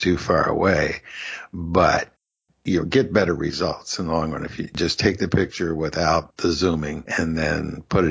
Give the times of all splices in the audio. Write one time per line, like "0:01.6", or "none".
0:04.7
0:06.4